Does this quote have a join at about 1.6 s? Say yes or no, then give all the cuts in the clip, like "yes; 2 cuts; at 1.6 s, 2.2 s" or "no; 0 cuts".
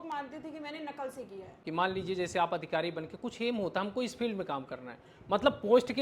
yes; 1 cut; at 1.6 s